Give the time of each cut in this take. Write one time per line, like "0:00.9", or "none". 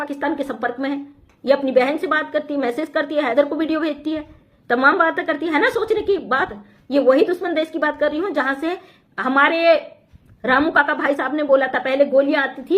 none